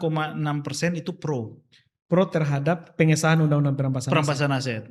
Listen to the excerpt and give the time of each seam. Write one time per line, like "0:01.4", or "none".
none